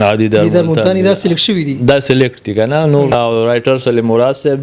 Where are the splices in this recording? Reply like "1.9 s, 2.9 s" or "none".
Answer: 3.1 s